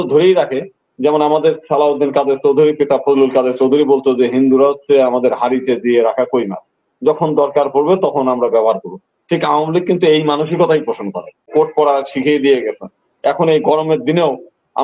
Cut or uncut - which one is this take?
cut